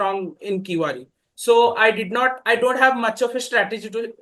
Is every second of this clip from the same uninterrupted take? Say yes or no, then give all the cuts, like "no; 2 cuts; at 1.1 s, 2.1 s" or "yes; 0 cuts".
yes; 0 cuts